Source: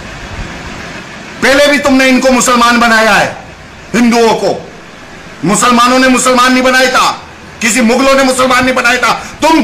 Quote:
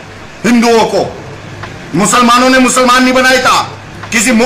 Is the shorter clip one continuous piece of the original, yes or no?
yes